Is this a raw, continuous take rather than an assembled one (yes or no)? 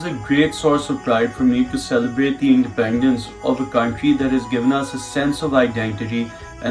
yes